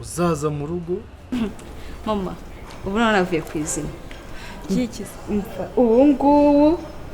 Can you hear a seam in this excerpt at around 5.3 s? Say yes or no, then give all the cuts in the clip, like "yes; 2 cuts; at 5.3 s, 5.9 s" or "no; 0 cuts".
no; 1 cut; at 1.3 s